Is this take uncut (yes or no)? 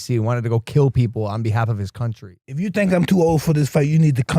no